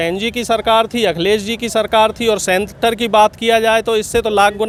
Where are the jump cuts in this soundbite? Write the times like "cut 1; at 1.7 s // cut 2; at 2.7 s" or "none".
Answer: none